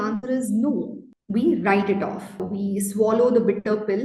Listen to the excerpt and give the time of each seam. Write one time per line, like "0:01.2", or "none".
0:01.2
0:02.4